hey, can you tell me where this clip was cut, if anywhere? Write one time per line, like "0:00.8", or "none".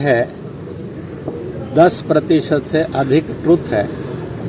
none